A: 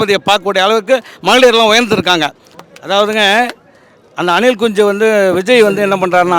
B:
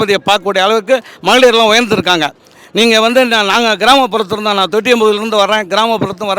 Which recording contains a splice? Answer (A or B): A